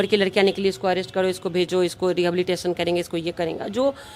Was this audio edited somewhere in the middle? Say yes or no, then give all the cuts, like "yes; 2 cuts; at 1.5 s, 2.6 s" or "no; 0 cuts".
no; 0 cuts